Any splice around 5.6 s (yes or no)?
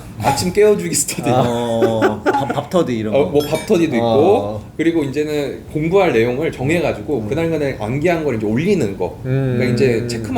no